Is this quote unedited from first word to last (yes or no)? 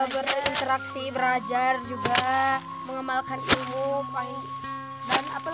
yes